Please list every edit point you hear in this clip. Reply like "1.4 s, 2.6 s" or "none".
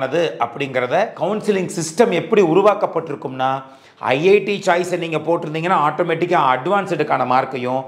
1.1 s